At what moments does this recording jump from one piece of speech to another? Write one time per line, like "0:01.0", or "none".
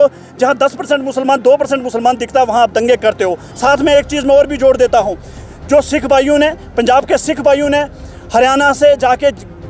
none